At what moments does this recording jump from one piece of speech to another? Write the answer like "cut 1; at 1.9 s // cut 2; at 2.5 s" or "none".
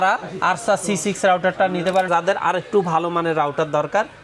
cut 1; at 2.1 s